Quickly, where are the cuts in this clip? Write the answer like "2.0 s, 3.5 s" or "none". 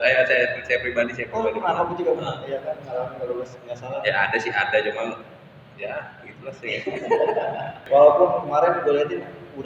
7.8 s